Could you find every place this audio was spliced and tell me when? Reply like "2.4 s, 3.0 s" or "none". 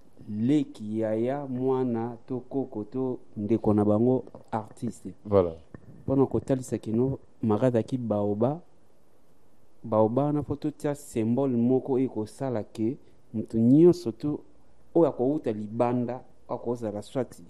none